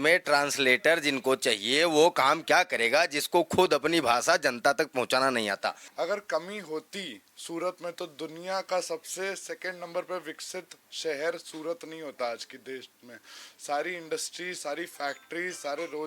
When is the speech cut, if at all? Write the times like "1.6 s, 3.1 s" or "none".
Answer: 5.8 s